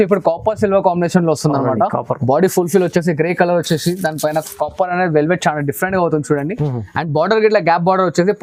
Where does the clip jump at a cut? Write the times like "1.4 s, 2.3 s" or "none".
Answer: none